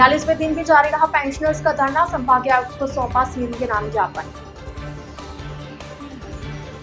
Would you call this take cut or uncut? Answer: uncut